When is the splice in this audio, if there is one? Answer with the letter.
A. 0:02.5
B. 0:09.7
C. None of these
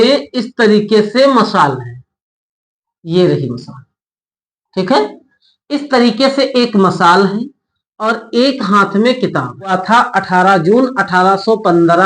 B